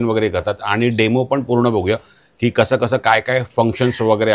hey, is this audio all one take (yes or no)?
yes